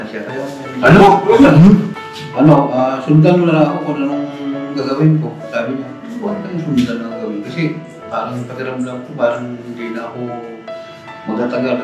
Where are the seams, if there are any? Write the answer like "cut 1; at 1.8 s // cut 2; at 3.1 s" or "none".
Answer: cut 1; at 1.9 s